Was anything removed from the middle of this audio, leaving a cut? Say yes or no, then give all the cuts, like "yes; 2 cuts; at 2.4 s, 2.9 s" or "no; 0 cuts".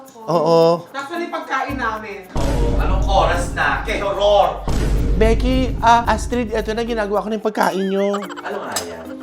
no; 0 cuts